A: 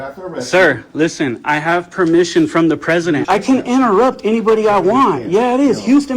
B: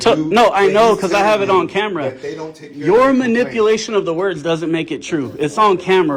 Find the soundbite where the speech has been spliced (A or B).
A